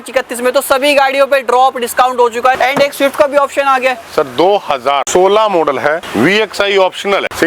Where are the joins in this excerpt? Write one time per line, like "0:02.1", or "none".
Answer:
none